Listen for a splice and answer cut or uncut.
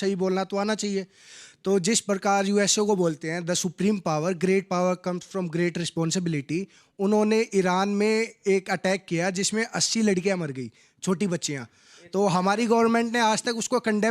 uncut